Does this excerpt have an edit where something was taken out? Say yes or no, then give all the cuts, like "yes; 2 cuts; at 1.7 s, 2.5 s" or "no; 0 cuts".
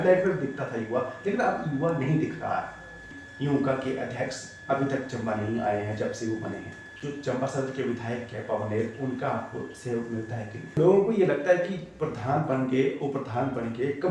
yes; 3 cuts; at 3.2 s, 6.8 s, 10.8 s